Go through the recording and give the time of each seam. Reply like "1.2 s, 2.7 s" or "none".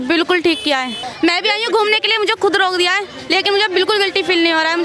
1.0 s